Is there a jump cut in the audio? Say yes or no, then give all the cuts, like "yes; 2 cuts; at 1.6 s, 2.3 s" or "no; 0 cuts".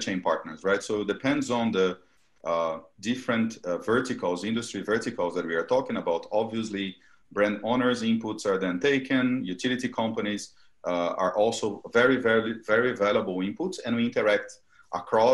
no; 0 cuts